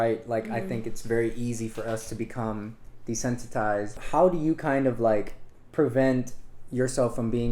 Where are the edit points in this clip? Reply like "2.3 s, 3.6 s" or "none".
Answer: 4.0 s